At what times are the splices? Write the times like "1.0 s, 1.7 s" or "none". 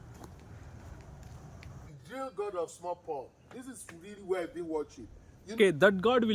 1.8 s, 5.5 s